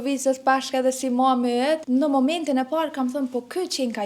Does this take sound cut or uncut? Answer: cut